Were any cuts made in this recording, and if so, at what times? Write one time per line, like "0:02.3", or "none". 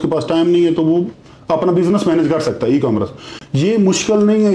none